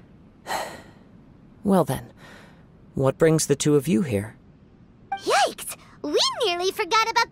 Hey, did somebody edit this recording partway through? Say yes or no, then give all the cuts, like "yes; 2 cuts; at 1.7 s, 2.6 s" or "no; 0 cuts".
no; 0 cuts